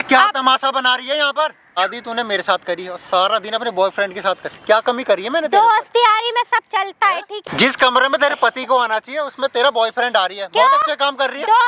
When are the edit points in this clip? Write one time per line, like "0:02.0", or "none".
0:01.8
0:07.5